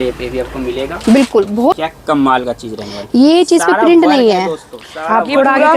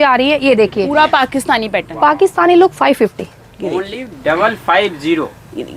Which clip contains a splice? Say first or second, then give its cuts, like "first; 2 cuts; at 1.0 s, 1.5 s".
first; 1 cut; at 1.8 s